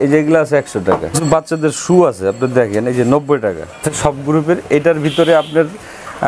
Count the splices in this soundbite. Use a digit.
2